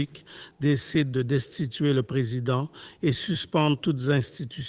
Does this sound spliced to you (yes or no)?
no